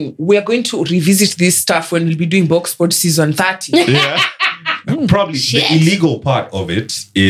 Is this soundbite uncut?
no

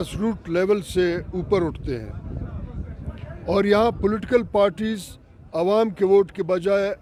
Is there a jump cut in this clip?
no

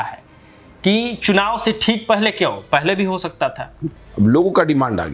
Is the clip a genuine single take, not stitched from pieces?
no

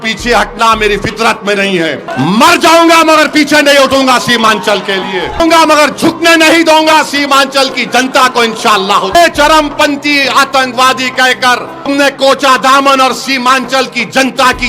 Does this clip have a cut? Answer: yes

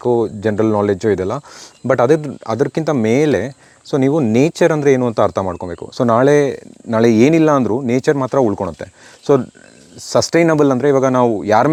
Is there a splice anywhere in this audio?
no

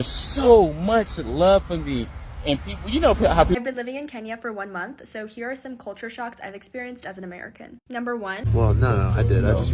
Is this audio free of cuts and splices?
no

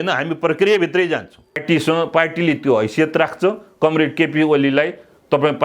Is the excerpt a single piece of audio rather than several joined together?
no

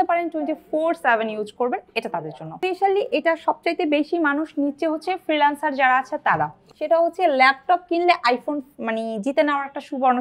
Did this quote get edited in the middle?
yes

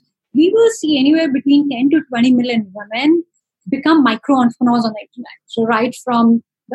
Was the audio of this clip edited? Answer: no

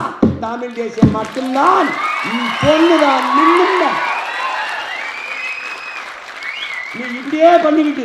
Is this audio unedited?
yes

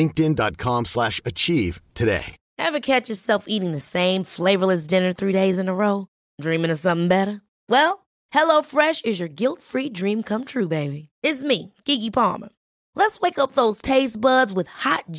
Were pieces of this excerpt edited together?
no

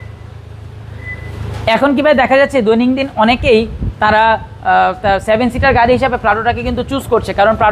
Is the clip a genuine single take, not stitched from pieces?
yes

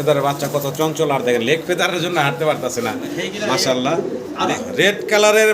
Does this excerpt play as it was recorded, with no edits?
no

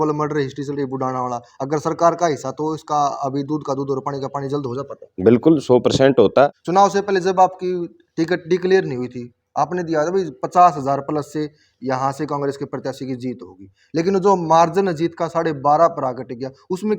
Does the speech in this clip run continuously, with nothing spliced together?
no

